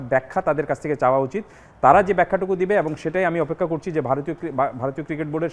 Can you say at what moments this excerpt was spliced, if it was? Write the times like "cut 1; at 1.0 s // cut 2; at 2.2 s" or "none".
none

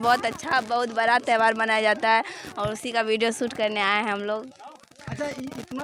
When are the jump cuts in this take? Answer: none

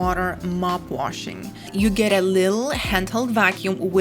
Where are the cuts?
cut 1; at 1.7 s

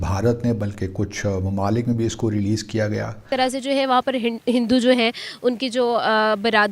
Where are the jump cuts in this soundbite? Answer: cut 1; at 3.2 s

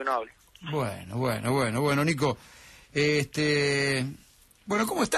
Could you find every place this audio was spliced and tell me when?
cut 1; at 3.9 s

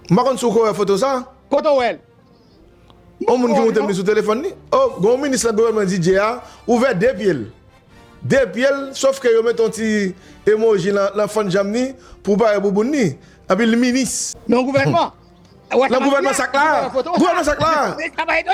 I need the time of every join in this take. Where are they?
none

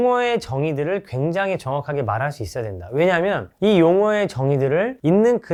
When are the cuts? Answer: none

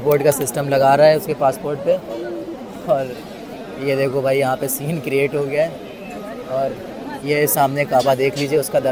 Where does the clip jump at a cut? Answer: none

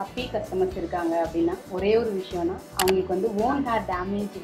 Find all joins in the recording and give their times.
none

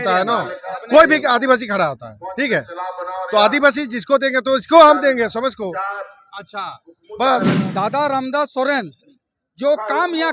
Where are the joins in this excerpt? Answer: cut 1; at 7.6 s

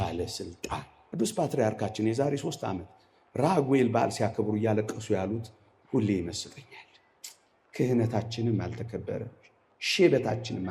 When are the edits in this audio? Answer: cut 1; at 1.0 s

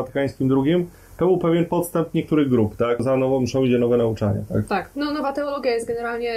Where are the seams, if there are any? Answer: cut 1; at 3.0 s

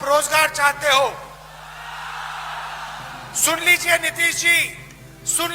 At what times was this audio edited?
none

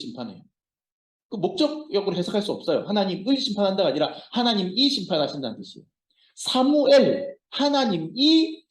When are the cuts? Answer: cut 1; at 7.4 s

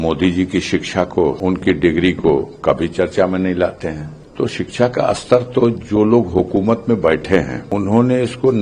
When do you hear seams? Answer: cut 1; at 1.4 s // cut 2; at 4.5 s // cut 3; at 7.6 s

